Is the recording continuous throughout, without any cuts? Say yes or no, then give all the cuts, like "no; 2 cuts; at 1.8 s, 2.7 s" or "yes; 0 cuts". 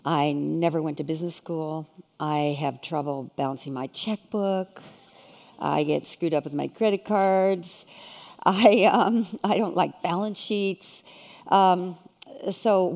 no; 1 cut; at 6.5 s